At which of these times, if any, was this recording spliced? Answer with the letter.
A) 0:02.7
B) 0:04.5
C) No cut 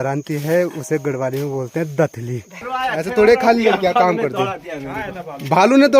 A